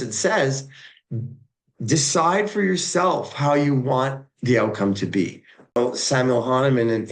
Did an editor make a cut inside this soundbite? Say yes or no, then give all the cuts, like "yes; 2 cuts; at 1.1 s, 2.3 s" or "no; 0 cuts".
yes; 1 cut; at 5.8 s